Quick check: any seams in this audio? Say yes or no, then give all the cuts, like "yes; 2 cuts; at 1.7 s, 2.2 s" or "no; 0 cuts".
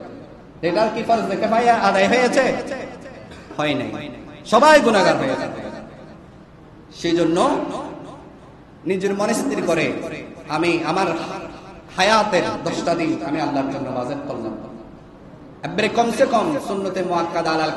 no; 0 cuts